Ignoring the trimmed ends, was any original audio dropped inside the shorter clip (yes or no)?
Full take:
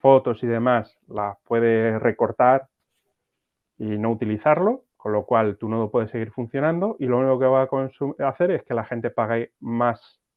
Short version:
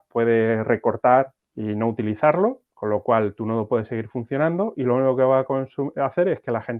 yes